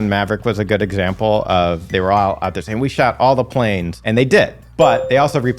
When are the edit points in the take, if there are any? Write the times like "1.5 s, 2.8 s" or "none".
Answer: none